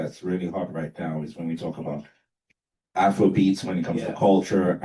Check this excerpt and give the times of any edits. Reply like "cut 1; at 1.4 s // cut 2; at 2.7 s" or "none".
none